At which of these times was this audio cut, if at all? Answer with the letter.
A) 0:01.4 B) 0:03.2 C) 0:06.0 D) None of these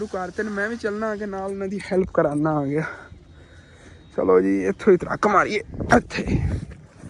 D